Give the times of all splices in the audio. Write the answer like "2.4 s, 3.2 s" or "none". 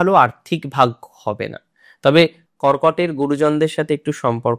2.5 s